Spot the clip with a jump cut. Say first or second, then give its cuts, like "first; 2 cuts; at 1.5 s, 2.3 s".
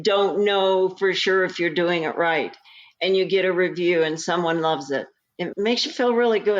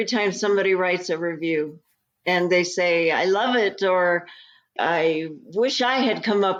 first; 1 cut; at 5.5 s